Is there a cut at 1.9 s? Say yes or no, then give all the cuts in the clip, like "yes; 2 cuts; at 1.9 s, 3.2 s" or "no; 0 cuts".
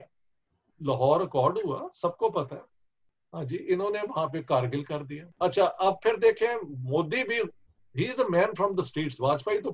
no; 1 cut; at 5.2 s